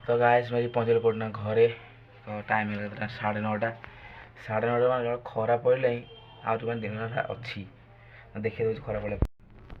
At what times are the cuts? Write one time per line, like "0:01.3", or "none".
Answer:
none